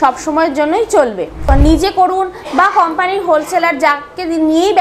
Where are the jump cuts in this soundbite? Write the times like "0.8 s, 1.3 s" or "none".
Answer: 1.4 s